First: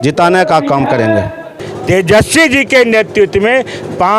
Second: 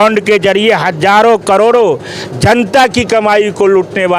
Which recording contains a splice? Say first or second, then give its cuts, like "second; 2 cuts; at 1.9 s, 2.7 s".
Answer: first; 1 cut; at 1.5 s